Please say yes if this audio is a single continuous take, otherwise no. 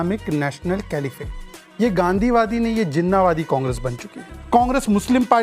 no